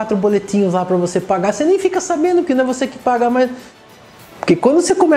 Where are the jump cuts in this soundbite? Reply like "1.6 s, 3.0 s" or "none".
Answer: 4.0 s

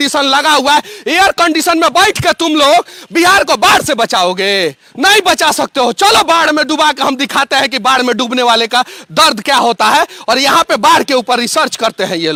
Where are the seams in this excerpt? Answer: none

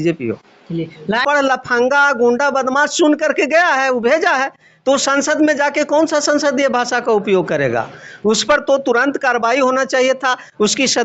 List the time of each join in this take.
1.1 s

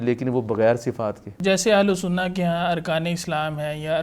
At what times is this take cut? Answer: 1.3 s

